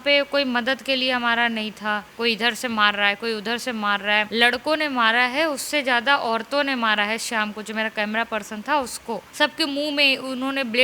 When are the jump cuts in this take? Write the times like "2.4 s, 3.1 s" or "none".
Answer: 2.1 s, 4.3 s, 9.3 s